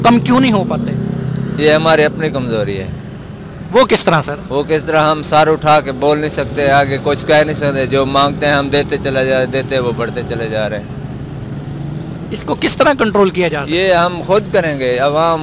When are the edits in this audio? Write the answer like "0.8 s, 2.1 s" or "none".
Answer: none